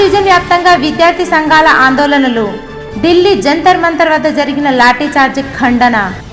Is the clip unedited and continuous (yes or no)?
yes